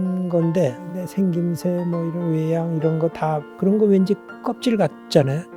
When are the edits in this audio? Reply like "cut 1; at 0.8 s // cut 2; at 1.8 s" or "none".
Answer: cut 1; at 0.8 s // cut 2; at 3.5 s

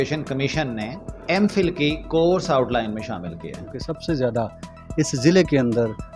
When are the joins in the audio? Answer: cut 1; at 1.1 s // cut 2; at 3.7 s

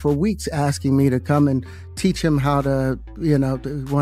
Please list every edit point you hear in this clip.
none

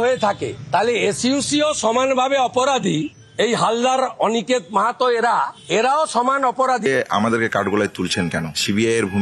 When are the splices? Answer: cut 1; at 6.9 s

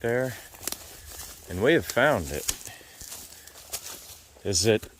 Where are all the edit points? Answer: cut 1; at 3.5 s

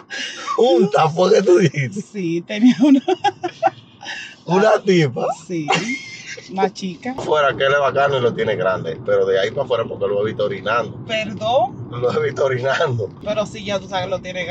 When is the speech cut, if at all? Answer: cut 1; at 7.2 s // cut 2; at 13.2 s

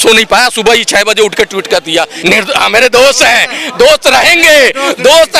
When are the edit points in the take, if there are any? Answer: cut 1; at 2.1 s

